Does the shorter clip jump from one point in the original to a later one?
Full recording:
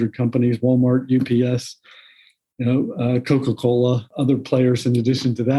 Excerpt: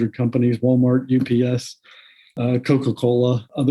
yes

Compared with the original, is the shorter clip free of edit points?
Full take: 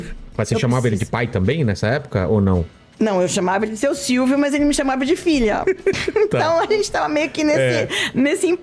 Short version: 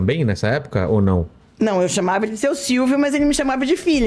yes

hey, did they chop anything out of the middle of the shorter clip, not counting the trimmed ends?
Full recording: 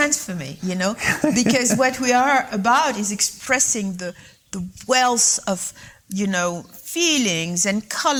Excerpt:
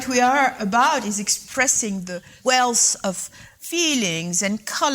yes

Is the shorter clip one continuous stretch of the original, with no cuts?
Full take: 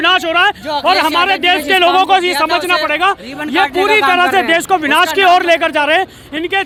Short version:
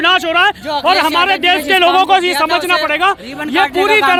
yes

